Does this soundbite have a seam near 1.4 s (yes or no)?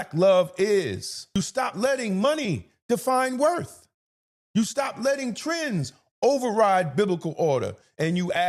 yes